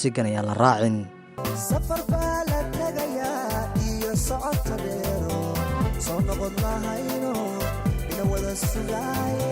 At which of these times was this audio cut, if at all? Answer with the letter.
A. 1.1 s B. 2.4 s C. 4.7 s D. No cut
A